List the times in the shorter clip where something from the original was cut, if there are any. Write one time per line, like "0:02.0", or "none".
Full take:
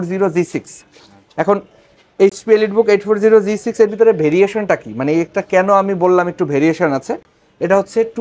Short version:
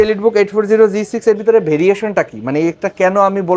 none